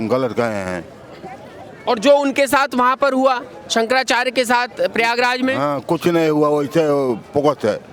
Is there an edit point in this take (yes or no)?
no